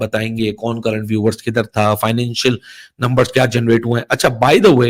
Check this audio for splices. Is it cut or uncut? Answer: uncut